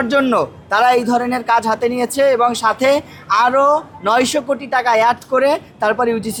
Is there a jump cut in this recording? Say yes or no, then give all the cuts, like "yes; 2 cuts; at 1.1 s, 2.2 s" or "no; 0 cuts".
no; 0 cuts